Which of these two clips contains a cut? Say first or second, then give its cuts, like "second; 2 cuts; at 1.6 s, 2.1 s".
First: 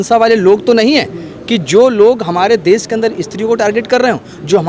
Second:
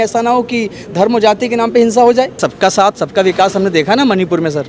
second; 1 cut; at 2.4 s